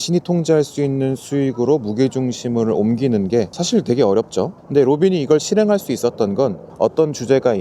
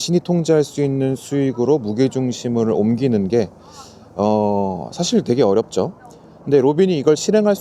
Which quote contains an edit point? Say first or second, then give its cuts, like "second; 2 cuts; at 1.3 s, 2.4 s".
first; 3 cuts; at 3.6 s, 4.6 s, 6.6 s